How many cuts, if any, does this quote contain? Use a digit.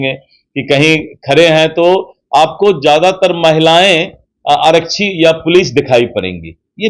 0